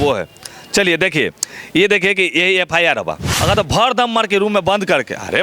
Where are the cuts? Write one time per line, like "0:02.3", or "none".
0:03.2